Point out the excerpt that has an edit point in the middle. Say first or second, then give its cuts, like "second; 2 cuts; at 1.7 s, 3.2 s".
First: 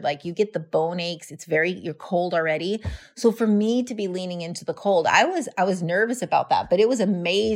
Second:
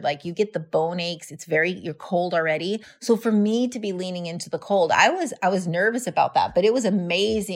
second; 1 cut; at 2.9 s